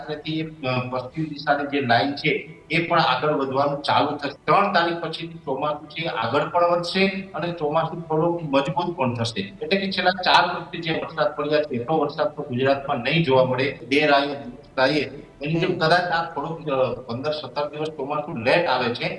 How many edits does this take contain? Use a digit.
3